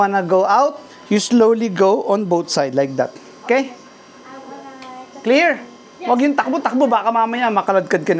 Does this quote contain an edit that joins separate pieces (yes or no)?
no